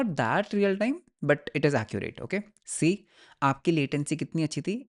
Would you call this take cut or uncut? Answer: cut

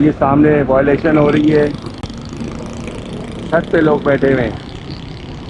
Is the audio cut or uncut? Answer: uncut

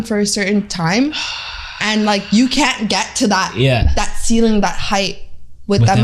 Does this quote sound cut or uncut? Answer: uncut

